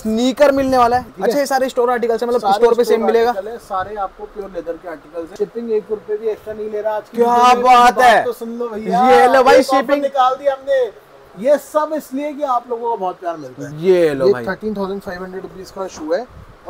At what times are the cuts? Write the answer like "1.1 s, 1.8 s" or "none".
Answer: 1.1 s, 5.3 s, 13.7 s